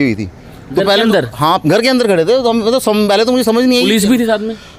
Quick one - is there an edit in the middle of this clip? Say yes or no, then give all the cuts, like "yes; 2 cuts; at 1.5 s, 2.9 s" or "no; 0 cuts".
no; 0 cuts